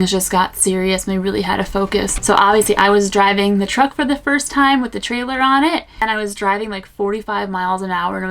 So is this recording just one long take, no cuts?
no; 2 cuts; at 2.1 s, 6.0 s

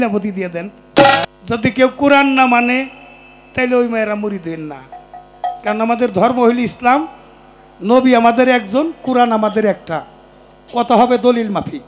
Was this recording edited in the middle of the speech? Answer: yes; 1 cut; at 1.3 s

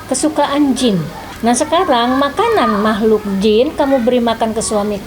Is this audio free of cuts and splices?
no; 1 cut; at 1.3 s

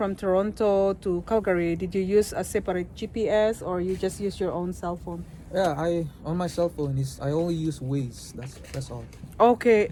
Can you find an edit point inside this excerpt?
no; 0 cuts

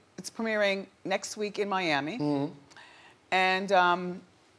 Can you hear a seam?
no; 0 cuts

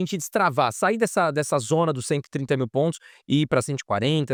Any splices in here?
no; 0 cuts

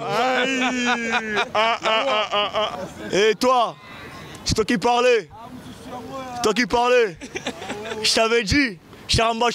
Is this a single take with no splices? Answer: no; 1 cut; at 2.7 s

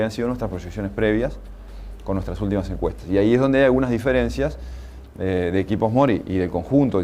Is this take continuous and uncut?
no; 1 cut; at 2.7 s

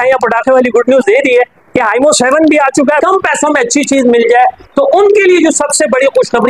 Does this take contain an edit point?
yes; 1 cut; at 3.0 s

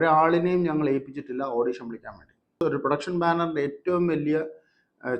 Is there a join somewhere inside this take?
yes; 1 cut; at 2.6 s

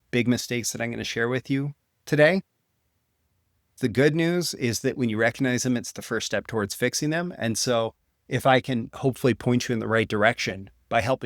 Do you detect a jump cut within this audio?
yes; 1 cut; at 3.7 s

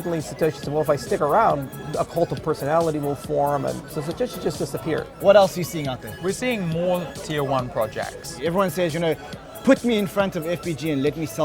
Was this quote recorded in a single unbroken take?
no; 4 cuts; at 3.9 s, 5.1 s, 6.1 s, 8.3 s

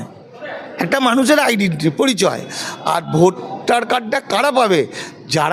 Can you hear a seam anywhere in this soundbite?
no; 0 cuts

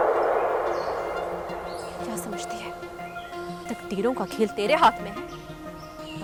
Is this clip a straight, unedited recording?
yes; 0 cuts

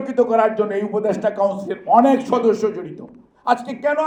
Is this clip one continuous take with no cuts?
yes; 0 cuts

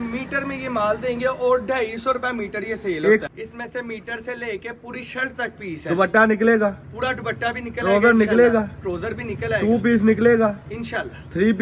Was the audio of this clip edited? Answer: yes; 1 cut; at 3.3 s

